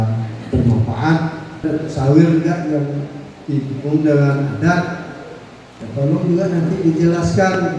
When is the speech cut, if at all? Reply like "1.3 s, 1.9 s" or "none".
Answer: 1.6 s